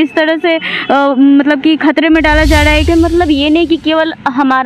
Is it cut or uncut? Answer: cut